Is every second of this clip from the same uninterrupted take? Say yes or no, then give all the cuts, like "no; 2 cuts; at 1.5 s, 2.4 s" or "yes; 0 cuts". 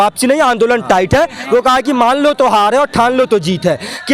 yes; 0 cuts